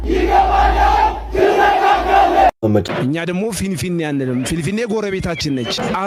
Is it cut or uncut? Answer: cut